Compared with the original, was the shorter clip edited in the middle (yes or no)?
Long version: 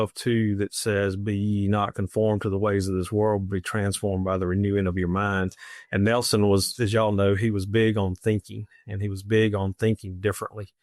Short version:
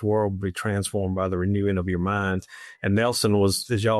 no